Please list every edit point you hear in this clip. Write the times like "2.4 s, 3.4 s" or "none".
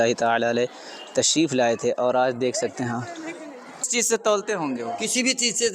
3.9 s